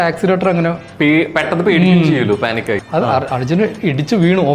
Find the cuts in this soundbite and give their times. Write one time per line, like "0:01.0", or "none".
0:02.8